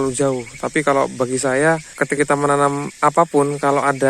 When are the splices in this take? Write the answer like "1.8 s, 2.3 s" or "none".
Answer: 2.2 s, 2.9 s